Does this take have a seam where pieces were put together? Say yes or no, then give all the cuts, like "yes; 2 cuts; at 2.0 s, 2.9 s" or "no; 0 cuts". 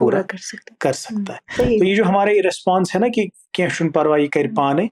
yes; 1 cut; at 1.4 s